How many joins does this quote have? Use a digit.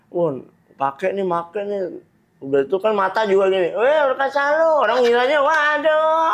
0